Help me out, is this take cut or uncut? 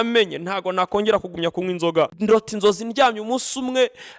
cut